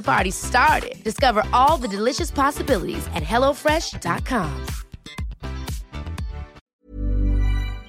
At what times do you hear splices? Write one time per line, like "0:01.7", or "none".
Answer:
0:06.6